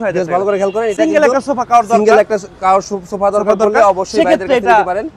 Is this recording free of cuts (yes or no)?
yes